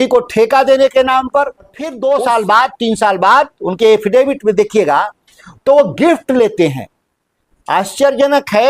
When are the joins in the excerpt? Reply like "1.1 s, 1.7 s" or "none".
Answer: 1.8 s